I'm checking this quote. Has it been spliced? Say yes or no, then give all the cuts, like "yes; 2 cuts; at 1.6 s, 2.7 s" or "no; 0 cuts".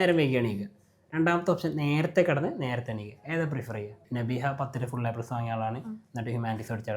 yes; 1 cut; at 4.0 s